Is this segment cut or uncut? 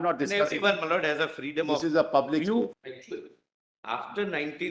cut